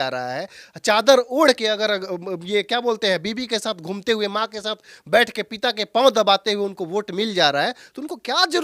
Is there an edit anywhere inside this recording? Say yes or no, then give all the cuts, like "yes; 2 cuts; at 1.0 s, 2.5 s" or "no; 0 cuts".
no; 0 cuts